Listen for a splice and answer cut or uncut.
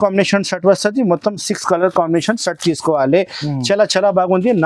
uncut